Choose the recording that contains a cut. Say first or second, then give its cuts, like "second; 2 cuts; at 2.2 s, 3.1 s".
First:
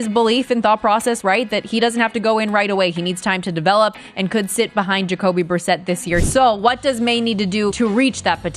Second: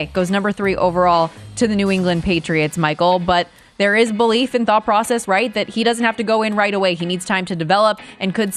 first; 2 cuts; at 6.2 s, 7.7 s